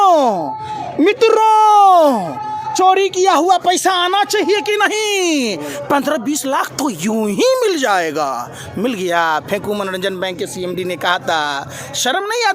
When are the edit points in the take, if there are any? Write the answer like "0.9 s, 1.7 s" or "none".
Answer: none